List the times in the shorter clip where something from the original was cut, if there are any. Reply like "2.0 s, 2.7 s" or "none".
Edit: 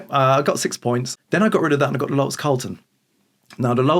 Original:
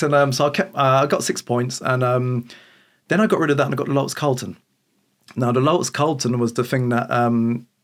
1.1 s

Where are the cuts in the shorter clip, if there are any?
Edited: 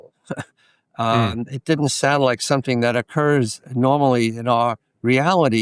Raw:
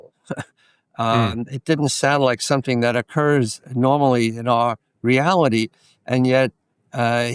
none

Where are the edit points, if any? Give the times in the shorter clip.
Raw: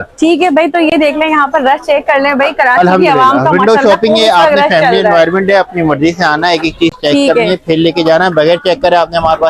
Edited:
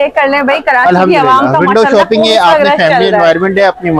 none

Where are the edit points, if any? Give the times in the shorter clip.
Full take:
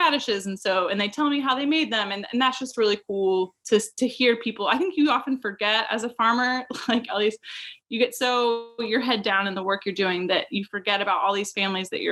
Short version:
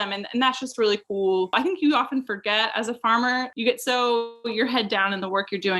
1.5 s, 3.5 s

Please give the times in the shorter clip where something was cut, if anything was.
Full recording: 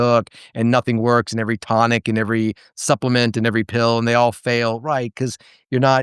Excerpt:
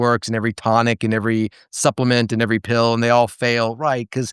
none

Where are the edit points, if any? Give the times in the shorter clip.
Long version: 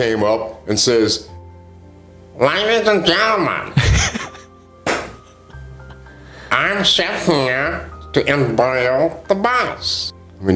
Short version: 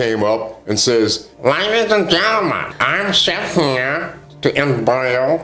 1.3 s, 2.7 s

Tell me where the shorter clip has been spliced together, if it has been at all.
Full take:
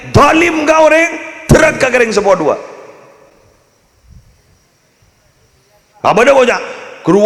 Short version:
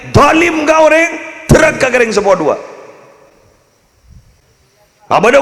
4.4 s

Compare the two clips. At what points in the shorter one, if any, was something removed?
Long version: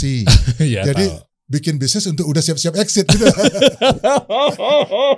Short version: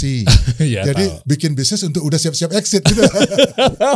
1.2 s

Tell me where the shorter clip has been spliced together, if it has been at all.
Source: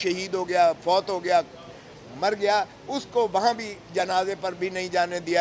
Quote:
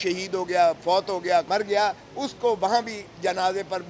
1.5 s

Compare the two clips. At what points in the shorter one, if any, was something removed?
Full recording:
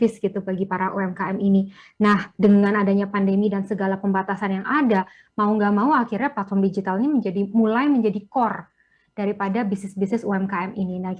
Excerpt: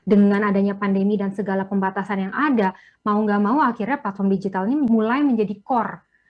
4.9 s

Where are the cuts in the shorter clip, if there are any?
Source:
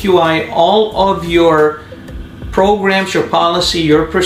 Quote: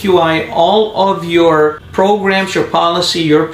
1.8 s

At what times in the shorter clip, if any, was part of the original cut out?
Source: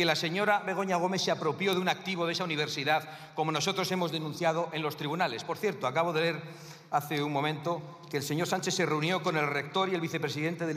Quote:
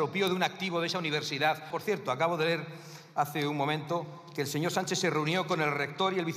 1.7 s

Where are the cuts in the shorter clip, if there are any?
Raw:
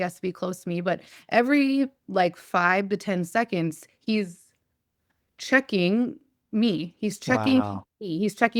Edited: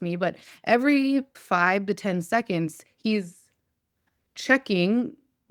1.4 s

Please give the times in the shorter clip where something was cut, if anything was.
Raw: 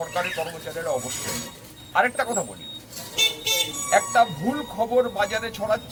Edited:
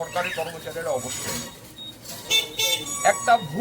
1.7 s

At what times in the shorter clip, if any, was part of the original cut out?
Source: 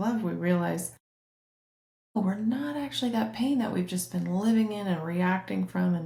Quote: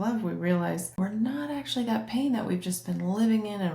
1.0 s

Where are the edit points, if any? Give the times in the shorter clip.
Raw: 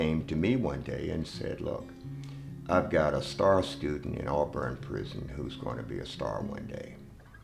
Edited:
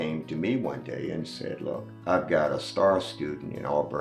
1.9 s

